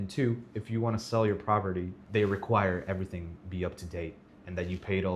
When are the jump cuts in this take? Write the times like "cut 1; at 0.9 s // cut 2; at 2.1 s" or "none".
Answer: cut 1; at 2.0 s